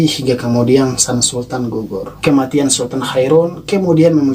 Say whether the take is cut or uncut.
cut